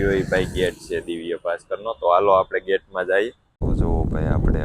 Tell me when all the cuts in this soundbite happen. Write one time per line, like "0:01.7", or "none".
0:03.5